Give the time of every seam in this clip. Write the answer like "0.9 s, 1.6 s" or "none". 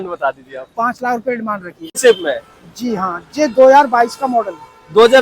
2.0 s